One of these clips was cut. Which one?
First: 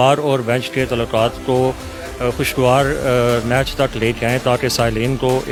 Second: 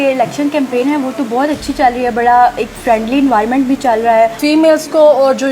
second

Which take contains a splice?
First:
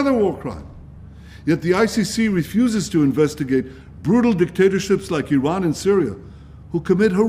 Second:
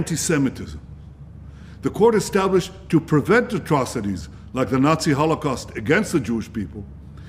first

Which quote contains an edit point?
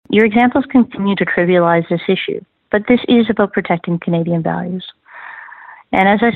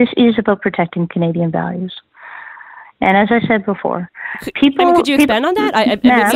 first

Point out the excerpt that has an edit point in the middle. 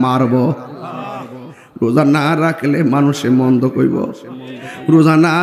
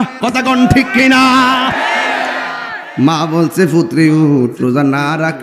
second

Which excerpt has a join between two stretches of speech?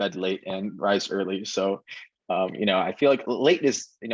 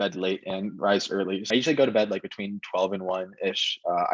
second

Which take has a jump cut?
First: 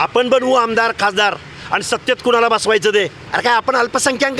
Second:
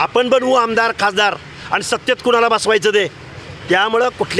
first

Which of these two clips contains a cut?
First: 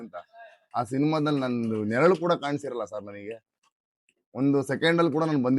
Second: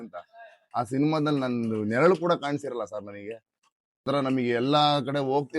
second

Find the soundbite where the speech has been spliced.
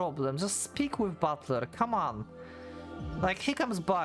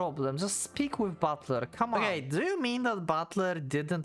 second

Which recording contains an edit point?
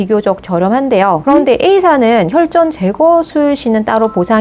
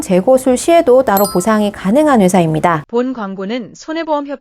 second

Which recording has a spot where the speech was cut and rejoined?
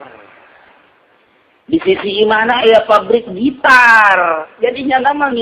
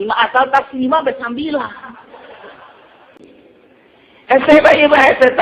second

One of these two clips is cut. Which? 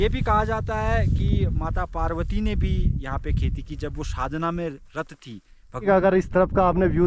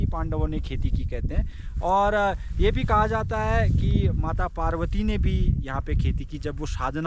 first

